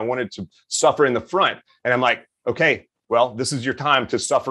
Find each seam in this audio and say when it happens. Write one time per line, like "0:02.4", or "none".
none